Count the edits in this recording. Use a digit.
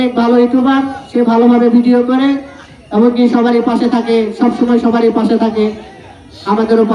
0